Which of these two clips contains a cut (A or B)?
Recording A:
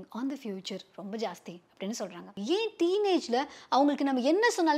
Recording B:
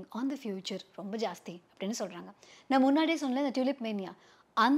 A